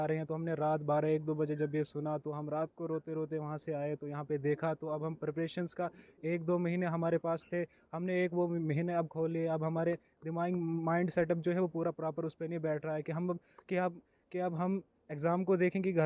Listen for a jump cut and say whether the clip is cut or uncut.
uncut